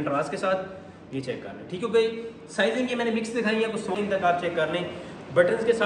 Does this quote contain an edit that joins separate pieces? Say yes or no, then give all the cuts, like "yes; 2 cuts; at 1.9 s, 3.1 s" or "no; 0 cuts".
yes; 1 cut; at 4.0 s